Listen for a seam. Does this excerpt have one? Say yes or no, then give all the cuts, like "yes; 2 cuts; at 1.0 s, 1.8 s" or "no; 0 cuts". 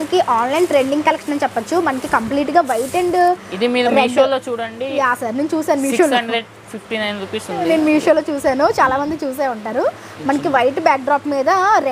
no; 0 cuts